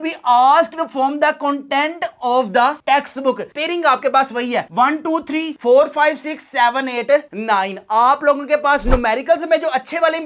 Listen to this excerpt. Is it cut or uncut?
cut